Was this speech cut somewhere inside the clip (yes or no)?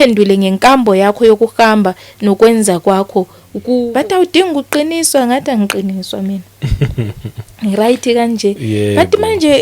yes